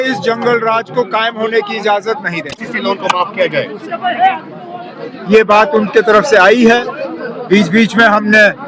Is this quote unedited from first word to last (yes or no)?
no